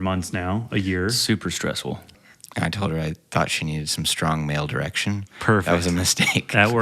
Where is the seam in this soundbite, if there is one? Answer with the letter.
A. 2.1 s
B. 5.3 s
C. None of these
A